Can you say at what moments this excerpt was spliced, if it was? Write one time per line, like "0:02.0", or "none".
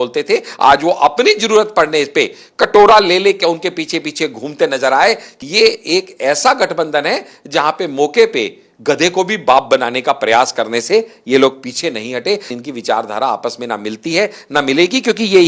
0:05.3
0:12.6